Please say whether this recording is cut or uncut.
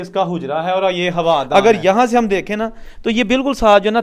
cut